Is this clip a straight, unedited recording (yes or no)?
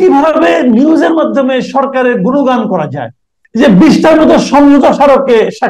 no